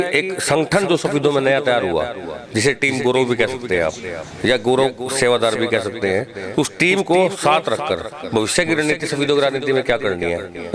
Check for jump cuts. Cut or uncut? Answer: uncut